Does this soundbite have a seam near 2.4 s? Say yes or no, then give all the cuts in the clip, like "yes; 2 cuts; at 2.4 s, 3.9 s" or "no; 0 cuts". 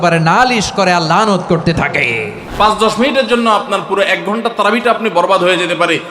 yes; 1 cut; at 2.4 s